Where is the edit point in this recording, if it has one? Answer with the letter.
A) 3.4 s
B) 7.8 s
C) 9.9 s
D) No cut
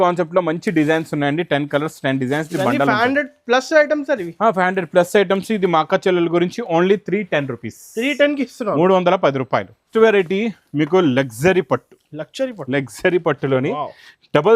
C